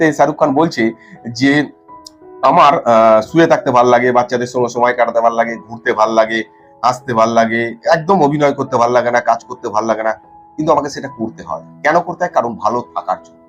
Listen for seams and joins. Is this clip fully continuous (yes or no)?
yes